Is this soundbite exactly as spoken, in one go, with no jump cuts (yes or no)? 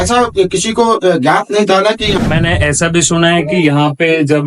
no